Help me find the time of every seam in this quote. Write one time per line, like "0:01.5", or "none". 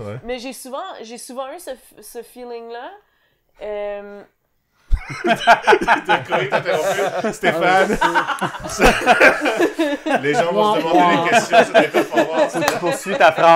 none